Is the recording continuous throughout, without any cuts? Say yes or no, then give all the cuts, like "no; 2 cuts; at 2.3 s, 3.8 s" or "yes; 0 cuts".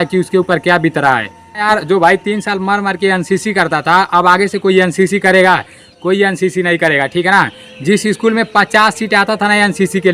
yes; 0 cuts